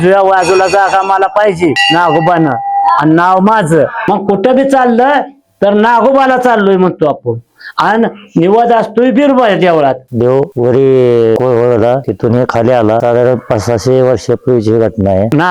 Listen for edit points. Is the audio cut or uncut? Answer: cut